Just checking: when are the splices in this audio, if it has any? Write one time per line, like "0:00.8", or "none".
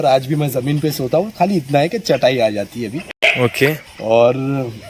none